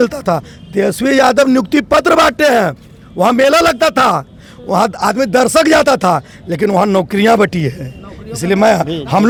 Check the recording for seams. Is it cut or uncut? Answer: uncut